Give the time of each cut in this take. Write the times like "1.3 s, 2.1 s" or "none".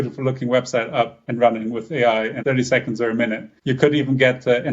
1.2 s, 2.4 s, 3.5 s

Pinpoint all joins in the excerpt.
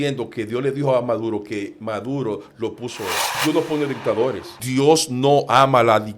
3.3 s, 4.5 s

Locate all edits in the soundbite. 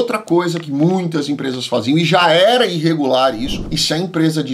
3.6 s

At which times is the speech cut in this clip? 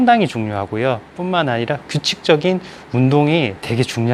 none

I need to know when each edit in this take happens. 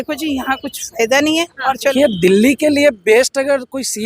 1.9 s

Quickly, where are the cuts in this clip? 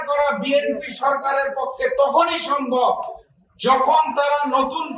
none

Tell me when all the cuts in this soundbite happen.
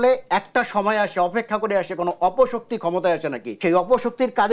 3.5 s

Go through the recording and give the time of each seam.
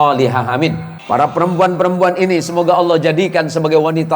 0.9 s

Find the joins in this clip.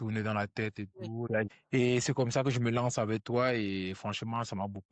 1.3 s

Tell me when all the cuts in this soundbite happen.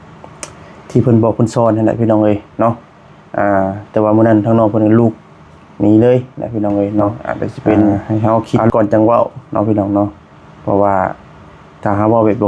8.0 s

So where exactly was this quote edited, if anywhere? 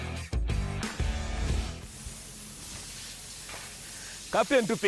1.7 s

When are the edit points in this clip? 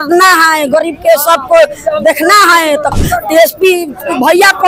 3.0 s

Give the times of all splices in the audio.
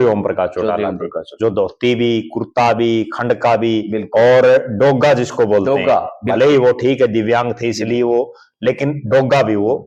none

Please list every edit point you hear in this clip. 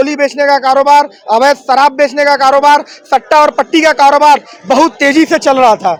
none

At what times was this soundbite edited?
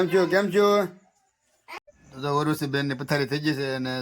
1.8 s

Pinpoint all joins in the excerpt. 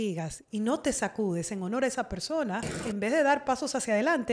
2.7 s

